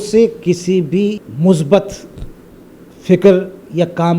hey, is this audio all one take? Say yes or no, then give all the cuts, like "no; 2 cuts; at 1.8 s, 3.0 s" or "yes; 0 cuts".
no; 1 cut; at 1.3 s